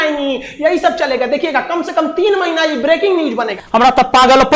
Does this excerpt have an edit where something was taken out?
yes; 1 cut; at 3.5 s

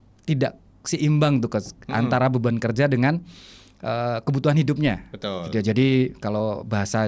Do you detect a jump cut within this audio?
no; 0 cuts

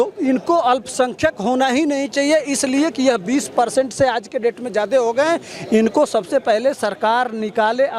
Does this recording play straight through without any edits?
yes; 0 cuts

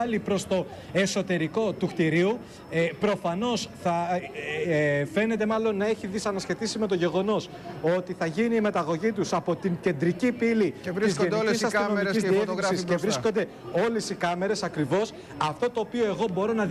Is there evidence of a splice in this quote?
no; 0 cuts

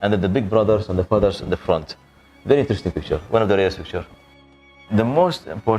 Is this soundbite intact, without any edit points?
no; 1 cut; at 4.8 s

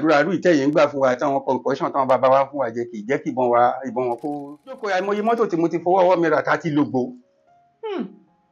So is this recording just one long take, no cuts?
no; 1 cut; at 4.8 s

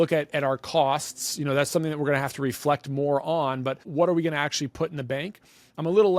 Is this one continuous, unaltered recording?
no; 1 cut; at 3.8 s

